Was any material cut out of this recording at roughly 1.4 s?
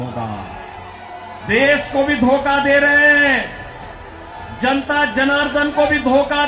yes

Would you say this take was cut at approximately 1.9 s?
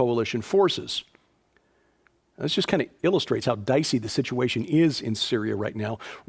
yes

